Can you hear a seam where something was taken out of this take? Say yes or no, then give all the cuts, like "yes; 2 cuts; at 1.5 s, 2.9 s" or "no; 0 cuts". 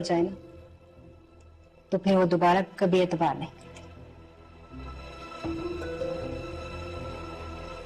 no; 0 cuts